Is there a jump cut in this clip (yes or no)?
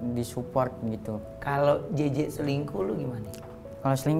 yes